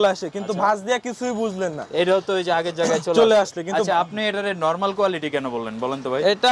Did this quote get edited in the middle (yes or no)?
no